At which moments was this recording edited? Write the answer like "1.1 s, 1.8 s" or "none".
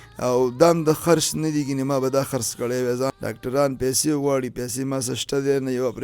3.1 s